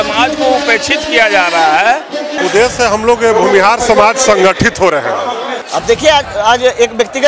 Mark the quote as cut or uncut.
cut